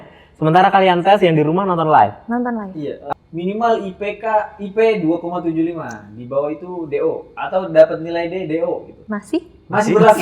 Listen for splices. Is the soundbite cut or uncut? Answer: cut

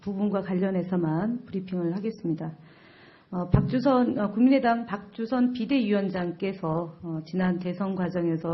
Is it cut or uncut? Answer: uncut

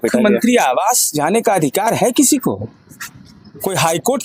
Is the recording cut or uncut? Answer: uncut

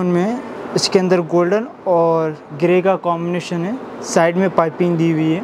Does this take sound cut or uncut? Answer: uncut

